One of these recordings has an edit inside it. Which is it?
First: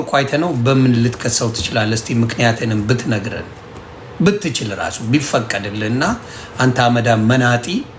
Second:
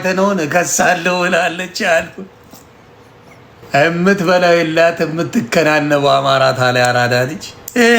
second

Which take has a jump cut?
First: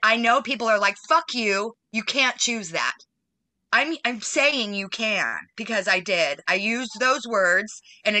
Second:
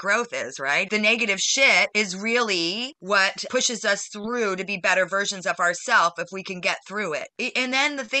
second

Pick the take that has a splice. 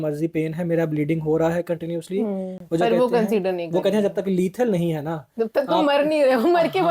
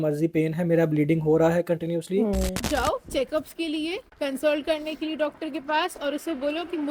second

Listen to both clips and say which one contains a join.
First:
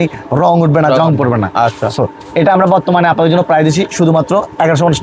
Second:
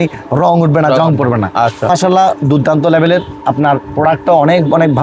second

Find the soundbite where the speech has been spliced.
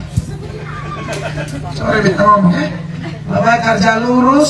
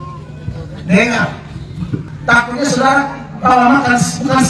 second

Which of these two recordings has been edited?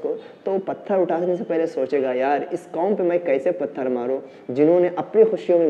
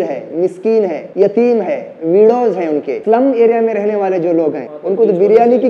second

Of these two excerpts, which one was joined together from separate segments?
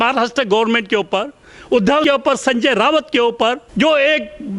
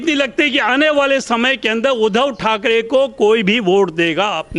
first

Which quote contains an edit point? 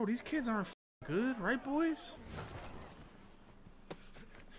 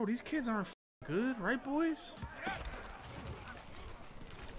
first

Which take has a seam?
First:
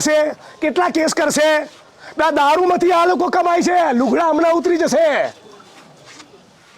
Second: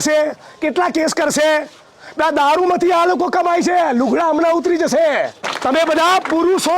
second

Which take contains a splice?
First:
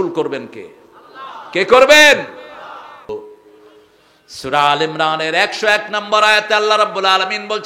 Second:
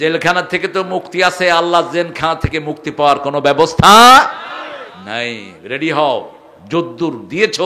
first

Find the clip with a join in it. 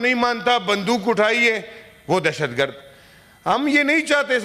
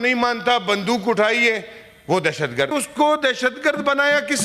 second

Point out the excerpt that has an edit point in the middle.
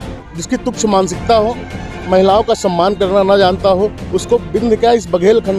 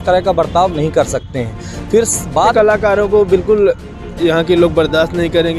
second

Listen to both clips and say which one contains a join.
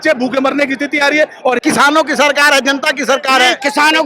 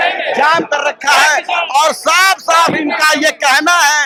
first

